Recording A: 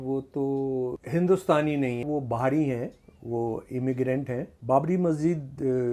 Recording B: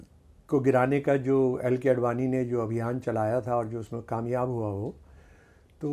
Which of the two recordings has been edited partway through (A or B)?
A